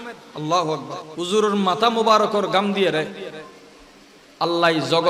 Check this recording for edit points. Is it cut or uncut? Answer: cut